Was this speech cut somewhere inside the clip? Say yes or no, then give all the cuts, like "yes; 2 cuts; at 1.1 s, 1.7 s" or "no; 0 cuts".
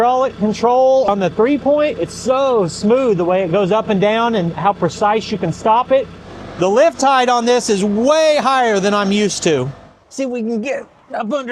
yes; 3 cuts; at 1.1 s, 6.2 s, 9.8 s